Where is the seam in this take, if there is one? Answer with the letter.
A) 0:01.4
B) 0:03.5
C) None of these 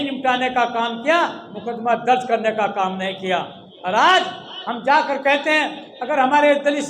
C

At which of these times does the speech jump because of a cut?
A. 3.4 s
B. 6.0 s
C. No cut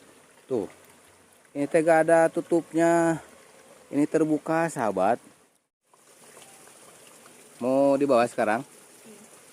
B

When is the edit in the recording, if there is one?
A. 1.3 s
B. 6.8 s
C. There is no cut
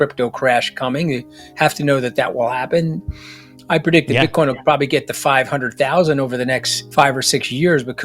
B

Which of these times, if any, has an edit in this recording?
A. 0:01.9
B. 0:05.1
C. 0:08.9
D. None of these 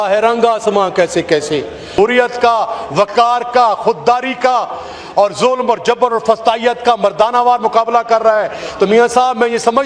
A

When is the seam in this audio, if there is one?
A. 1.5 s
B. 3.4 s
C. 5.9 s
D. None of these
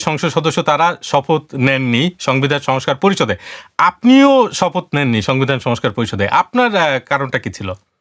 D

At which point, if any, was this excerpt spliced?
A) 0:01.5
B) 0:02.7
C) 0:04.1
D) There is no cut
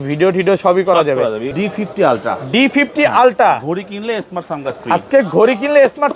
A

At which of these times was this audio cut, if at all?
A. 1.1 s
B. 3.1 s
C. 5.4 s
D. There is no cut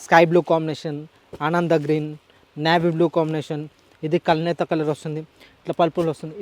D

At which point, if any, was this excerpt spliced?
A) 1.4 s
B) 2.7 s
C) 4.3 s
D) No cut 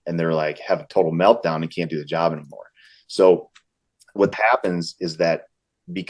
C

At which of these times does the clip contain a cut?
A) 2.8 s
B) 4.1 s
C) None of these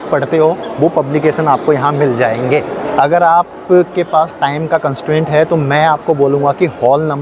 A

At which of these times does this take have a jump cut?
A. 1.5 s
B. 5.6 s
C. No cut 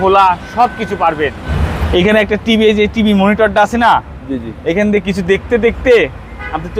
A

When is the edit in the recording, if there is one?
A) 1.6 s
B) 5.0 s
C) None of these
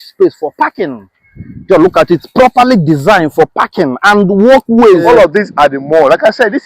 B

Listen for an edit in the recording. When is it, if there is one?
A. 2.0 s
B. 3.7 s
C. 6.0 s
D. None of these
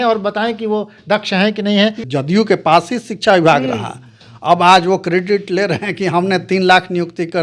A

